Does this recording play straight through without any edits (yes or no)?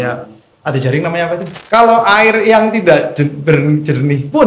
no